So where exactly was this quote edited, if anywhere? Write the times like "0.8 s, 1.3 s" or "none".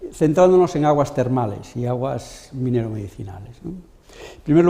1.9 s